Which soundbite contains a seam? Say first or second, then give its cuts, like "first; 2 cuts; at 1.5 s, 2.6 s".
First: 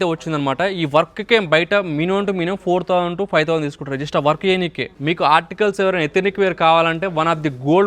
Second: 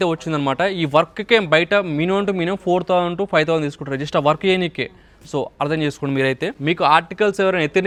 first; 1 cut; at 4.9 s